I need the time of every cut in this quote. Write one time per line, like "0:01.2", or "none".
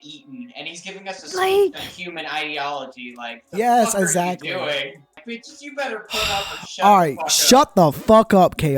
0:05.2